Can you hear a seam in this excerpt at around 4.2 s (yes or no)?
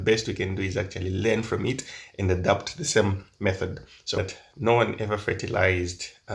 yes